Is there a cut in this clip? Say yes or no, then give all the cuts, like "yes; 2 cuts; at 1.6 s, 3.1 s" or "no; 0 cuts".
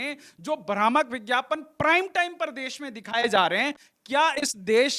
no; 0 cuts